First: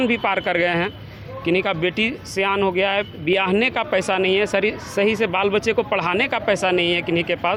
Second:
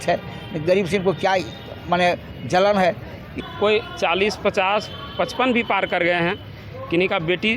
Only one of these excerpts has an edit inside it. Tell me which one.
second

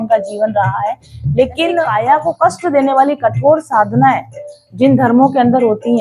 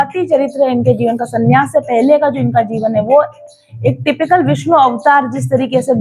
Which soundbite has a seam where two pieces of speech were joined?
first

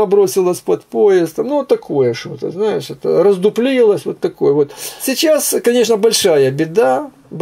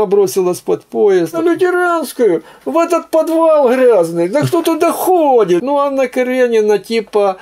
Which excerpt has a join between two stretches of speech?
second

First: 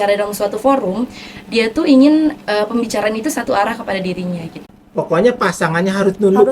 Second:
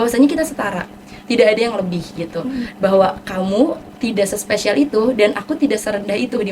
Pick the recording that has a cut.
first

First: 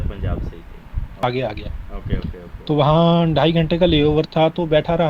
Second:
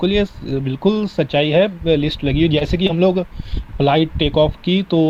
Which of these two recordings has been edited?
first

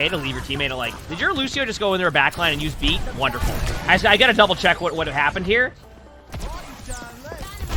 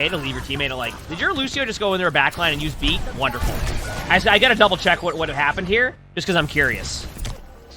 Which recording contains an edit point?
first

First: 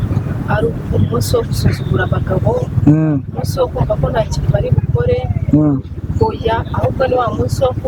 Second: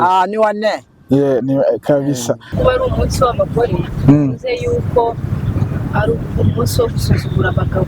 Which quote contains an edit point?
second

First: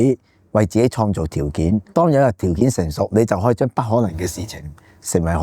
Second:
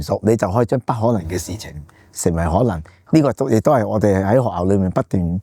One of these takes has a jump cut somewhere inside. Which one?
first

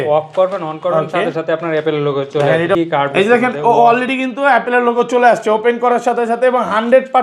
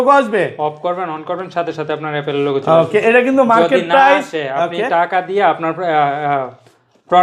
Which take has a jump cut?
first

